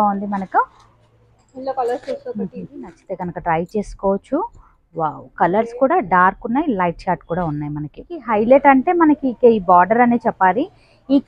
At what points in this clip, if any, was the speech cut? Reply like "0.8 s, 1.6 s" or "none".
3.0 s, 8.3 s